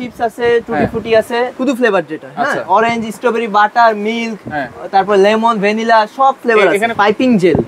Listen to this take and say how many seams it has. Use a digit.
2